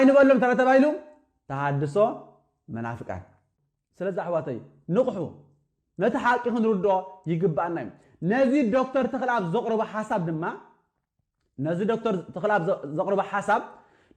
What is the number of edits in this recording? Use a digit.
1